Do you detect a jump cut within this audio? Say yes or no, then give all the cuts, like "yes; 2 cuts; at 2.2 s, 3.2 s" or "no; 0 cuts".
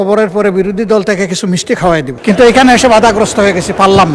yes; 1 cut; at 2.1 s